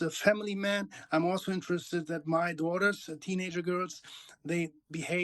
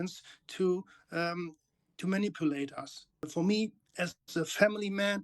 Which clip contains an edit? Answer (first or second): second